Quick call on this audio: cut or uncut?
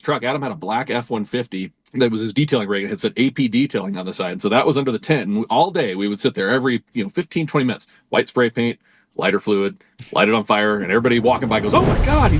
cut